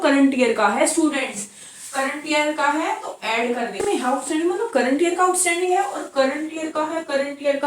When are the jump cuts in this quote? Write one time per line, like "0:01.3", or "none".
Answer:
0:03.7